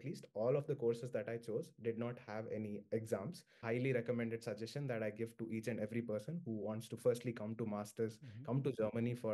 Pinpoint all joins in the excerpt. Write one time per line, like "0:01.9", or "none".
0:03.6